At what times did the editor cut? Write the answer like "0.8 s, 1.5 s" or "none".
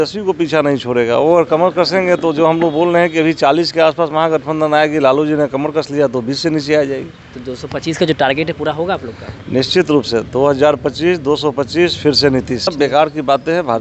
12.7 s